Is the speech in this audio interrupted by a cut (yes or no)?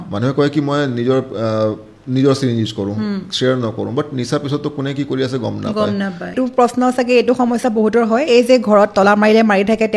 yes